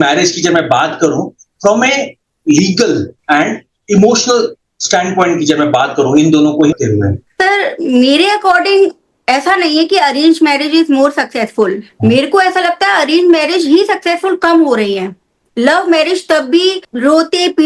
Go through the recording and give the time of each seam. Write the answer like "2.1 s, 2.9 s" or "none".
none

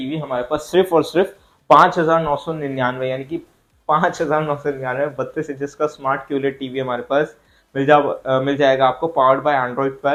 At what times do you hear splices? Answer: none

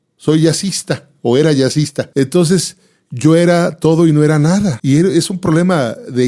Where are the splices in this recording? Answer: 2.1 s, 4.8 s

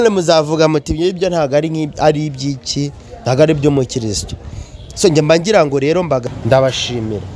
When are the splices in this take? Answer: 6.2 s

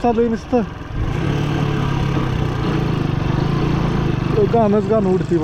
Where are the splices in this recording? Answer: none

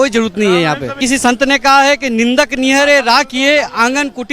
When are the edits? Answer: 1.0 s

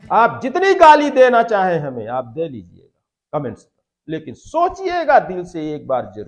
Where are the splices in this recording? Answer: none

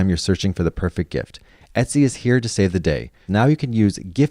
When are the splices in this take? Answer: 3.2 s

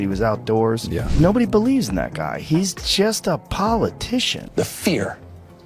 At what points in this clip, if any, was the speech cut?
4.4 s

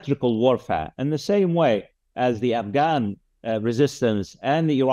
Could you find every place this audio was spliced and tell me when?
none

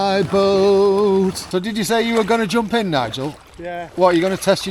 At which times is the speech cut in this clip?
1.4 s

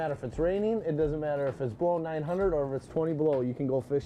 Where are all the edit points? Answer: none

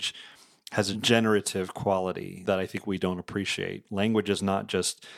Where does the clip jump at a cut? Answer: 1.0 s

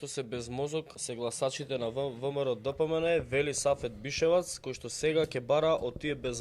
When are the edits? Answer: 1.0 s

